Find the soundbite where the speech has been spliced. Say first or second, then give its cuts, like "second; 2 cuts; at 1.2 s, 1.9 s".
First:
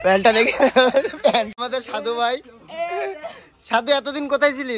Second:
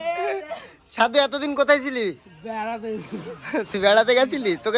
first; 1 cut; at 1.6 s